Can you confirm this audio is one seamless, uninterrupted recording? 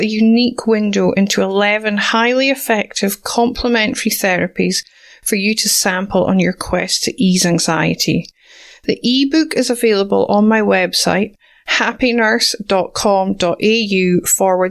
yes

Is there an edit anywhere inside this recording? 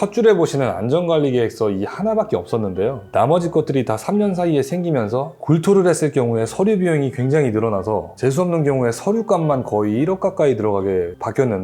no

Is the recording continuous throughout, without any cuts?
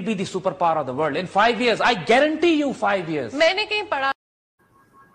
yes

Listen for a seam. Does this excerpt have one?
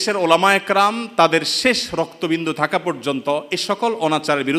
no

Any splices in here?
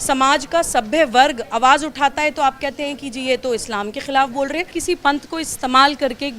yes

